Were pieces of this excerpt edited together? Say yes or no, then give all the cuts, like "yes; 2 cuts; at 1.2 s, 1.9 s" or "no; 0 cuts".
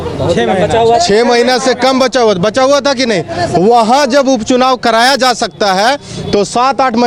no; 0 cuts